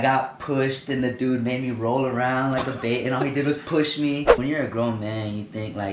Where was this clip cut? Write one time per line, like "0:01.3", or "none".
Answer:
0:04.3